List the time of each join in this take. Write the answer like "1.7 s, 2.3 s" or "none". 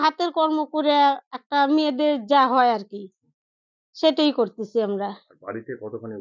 none